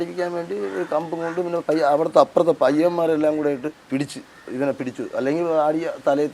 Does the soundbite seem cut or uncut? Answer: cut